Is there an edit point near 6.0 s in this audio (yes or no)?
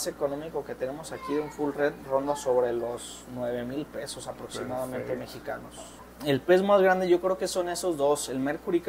yes